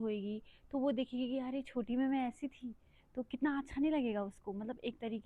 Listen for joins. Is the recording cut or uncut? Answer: uncut